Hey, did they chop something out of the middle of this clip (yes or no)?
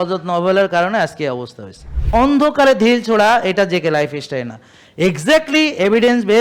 yes